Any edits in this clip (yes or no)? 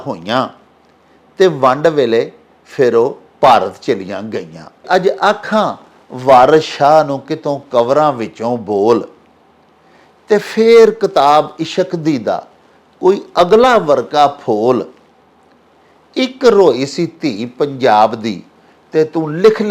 yes